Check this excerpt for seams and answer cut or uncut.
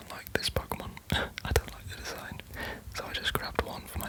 uncut